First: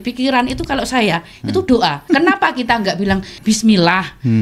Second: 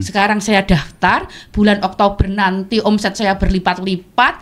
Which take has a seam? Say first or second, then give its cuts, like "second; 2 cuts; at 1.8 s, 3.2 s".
first; 2 cuts; at 2.0 s, 3.3 s